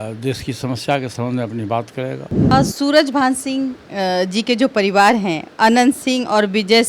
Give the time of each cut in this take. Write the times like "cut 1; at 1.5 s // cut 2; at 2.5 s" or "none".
cut 1; at 2.3 s

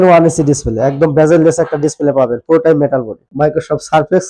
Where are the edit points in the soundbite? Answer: cut 1; at 3.3 s

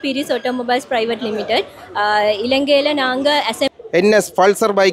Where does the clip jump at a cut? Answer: cut 1; at 3.7 s

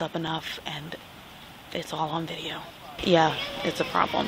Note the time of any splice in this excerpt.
cut 1; at 3.0 s

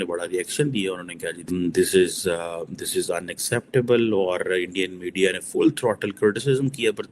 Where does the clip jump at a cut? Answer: cut 1; at 1.4 s

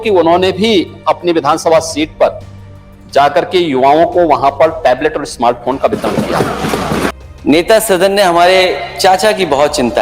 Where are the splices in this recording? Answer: cut 1; at 7.1 s

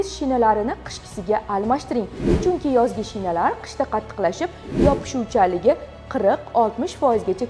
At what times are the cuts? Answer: none

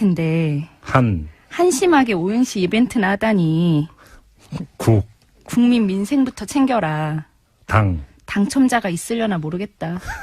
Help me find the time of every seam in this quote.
cut 1; at 2.9 s

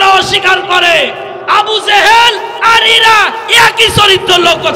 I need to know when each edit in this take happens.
none

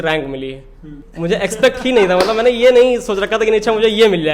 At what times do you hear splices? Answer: cut 1; at 1.0 s

